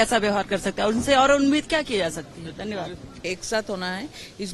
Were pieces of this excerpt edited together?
no; 0 cuts

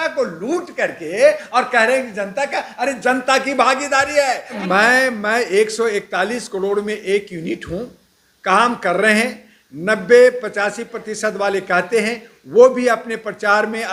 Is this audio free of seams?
no; 1 cut; at 4.6 s

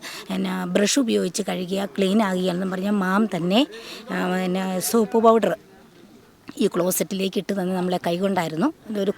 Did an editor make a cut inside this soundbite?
no; 0 cuts

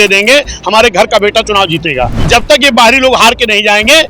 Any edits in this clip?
yes; 1 cut; at 2.2 s

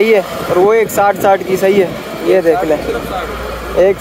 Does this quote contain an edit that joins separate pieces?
no; 0 cuts

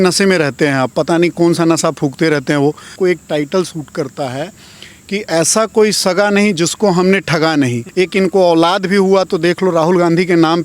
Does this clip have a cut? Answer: yes; 2 cuts; at 2.9 s, 7.8 s

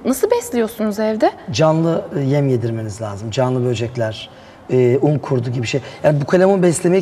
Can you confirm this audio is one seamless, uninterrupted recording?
yes; 0 cuts

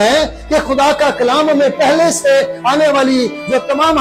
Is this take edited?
no; 0 cuts

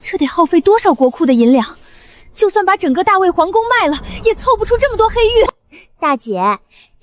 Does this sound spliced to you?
yes; 1 cut; at 5.7 s

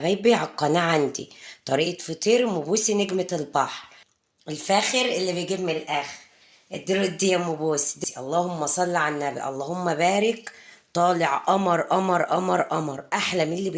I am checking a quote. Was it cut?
yes; 2 cuts; at 4.2 s, 7.9 s

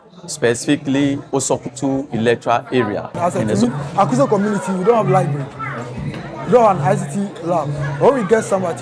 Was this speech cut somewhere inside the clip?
yes; 1 cut; at 3.2 s

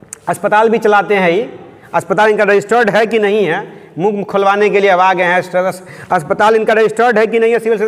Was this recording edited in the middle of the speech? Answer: no; 0 cuts

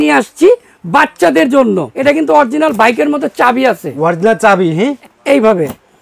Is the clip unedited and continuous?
no; 2 cuts; at 1.9 s, 5.0 s

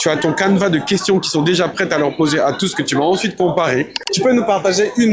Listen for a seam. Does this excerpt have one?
yes; 1 cut; at 4.0 s

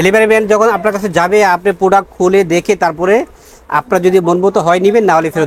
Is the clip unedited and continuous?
yes; 0 cuts

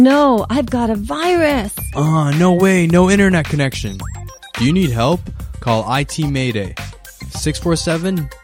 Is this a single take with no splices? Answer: yes; 0 cuts

